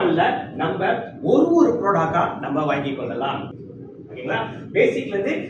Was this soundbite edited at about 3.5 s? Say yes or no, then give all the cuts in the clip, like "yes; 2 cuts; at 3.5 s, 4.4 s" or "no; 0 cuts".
yes; 1 cut; at 3.5 s